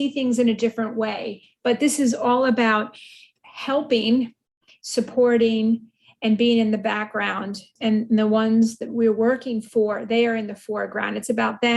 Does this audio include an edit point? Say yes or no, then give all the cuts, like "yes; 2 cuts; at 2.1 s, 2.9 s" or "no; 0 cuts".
no; 0 cuts